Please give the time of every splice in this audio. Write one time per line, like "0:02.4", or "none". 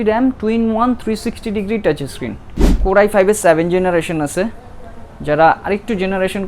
0:02.8